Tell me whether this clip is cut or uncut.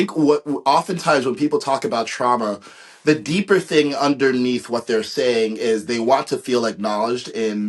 uncut